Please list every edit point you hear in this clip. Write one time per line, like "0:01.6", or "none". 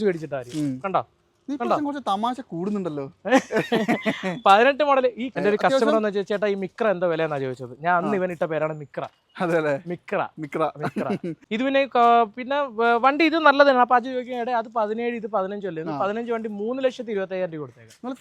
0:05.3
0:11.4